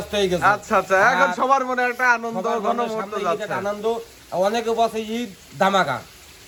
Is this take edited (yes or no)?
no